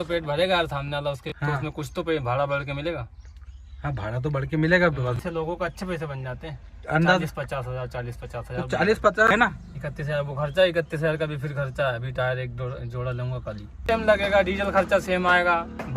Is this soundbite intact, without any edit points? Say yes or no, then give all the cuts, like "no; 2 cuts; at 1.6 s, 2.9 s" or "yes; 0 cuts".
no; 4 cuts; at 1.3 s, 5.2 s, 9.3 s, 13.8 s